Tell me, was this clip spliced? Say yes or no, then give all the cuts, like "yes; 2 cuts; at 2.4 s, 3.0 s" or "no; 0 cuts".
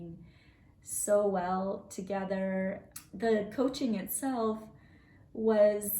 yes; 1 cut; at 2.8 s